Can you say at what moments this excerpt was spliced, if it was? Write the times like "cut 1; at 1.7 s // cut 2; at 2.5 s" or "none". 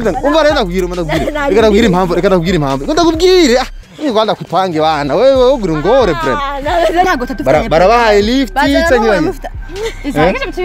cut 1; at 7.0 s